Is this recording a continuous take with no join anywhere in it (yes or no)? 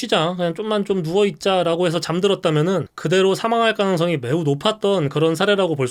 yes